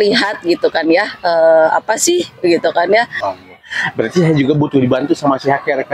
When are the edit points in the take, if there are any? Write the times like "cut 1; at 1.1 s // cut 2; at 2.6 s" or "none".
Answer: cut 1; at 3.3 s